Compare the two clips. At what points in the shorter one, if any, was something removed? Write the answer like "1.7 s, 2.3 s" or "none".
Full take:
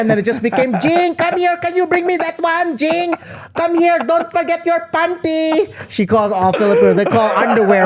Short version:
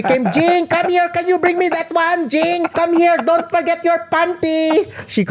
2.7 s